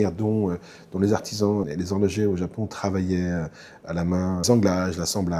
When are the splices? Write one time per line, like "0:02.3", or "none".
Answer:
0:01.7
0:04.4